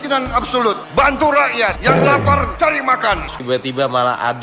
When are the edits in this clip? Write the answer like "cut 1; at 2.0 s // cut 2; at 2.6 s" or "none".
cut 1; at 3.4 s